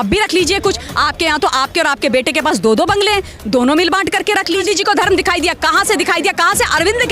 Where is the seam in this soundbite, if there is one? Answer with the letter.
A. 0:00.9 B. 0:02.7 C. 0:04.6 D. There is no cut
C